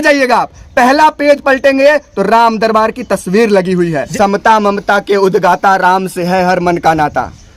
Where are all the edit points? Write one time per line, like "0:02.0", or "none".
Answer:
0:04.1

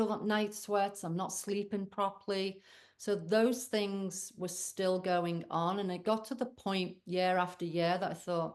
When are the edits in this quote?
none

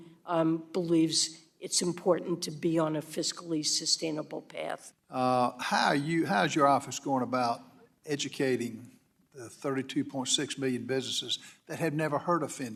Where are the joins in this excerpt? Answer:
none

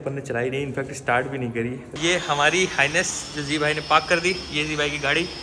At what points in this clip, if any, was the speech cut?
0:01.8

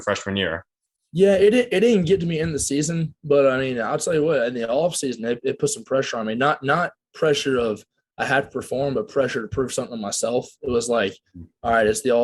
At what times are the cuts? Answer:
none

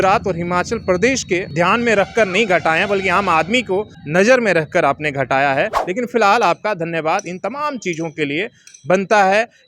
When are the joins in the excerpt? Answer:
0:01.5
0:04.0
0:05.8

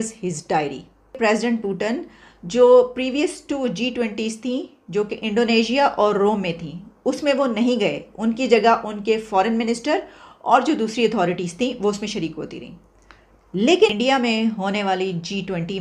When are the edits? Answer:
0:01.2
0:13.9

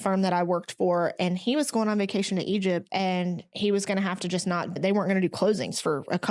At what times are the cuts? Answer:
0:02.9
0:04.8

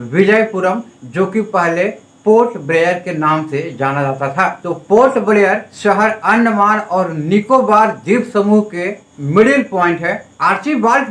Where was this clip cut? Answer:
0:04.6
0:10.2

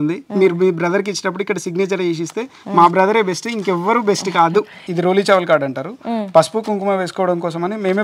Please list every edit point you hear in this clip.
0:04.8

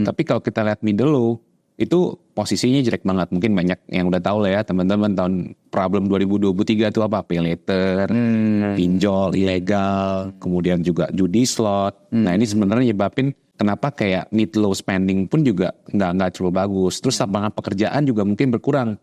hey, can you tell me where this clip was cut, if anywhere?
0:13.4

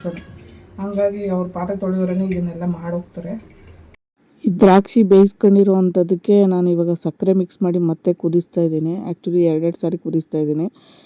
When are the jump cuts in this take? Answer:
0:04.0

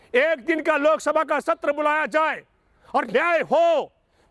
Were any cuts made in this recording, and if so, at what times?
none

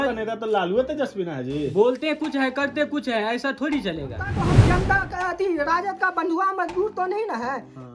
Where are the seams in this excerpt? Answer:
0:04.4

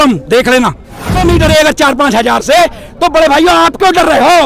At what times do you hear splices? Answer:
0:01.1

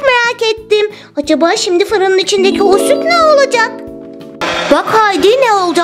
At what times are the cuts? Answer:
none

